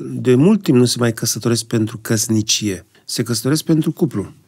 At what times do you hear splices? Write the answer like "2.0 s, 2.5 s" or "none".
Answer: 3.0 s